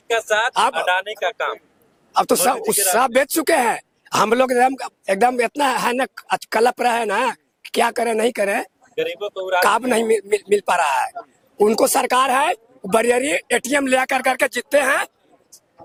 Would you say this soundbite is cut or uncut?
uncut